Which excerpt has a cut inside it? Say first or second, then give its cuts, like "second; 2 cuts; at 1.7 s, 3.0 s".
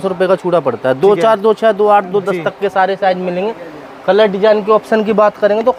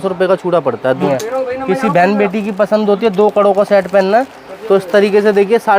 second; 1 cut; at 1.0 s